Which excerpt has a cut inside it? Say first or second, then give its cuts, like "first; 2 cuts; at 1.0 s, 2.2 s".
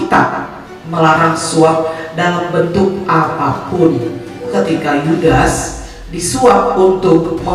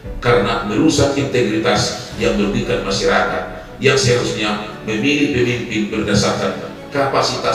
first; 1 cut; at 4.5 s